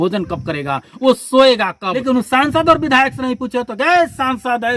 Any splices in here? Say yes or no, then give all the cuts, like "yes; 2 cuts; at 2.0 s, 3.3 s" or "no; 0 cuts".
yes; 1 cut; at 2.0 s